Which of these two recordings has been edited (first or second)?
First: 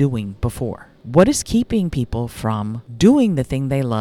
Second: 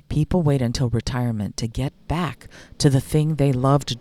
first